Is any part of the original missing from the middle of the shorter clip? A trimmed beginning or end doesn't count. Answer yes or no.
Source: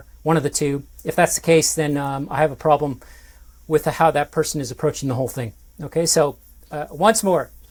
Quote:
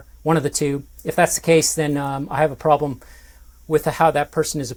no